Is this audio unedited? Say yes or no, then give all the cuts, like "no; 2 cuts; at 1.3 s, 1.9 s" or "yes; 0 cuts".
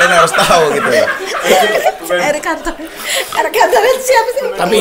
yes; 0 cuts